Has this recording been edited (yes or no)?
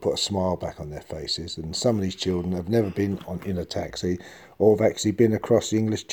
no